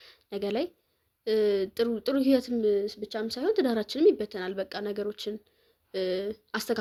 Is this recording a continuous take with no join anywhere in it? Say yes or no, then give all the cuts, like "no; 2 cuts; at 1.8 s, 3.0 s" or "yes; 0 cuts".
yes; 0 cuts